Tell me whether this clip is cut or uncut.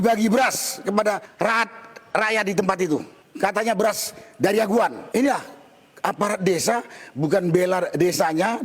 cut